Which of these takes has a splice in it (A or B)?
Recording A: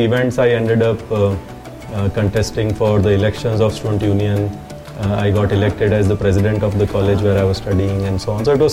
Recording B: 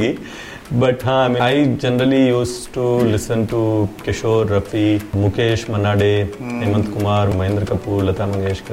B